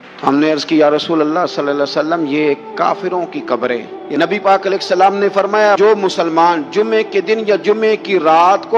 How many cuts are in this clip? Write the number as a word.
one